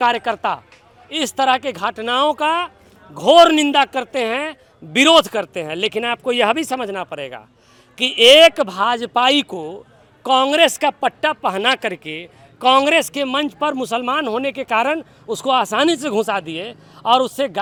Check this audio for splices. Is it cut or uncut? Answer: uncut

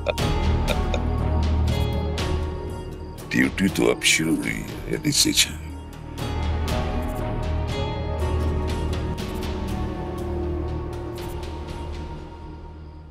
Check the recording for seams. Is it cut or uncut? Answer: uncut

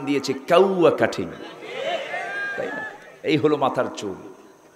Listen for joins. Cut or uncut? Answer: uncut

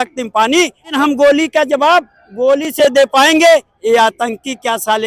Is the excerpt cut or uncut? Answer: cut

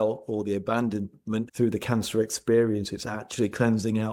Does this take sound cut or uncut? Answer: cut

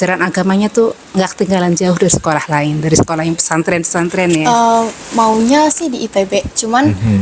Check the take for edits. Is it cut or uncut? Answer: cut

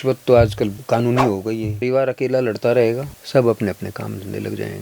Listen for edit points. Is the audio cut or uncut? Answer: cut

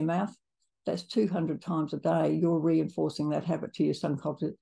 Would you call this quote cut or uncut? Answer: uncut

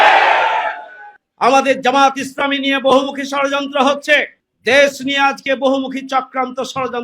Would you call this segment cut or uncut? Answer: cut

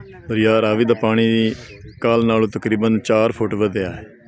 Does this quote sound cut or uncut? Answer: uncut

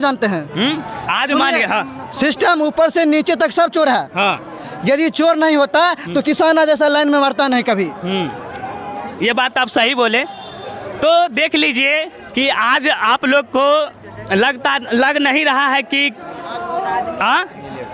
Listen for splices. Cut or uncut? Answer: uncut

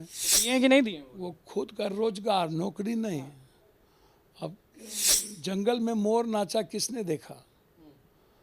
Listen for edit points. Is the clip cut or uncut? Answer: cut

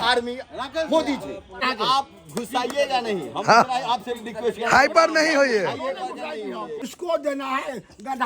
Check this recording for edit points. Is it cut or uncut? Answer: cut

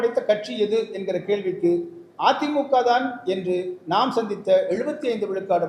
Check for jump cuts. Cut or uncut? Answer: uncut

